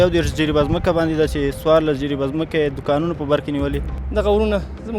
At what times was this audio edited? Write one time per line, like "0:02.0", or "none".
0:03.9